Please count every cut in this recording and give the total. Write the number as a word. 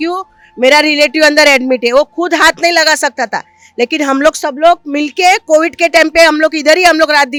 zero